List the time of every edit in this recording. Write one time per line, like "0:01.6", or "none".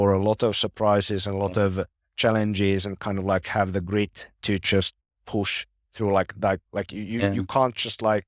none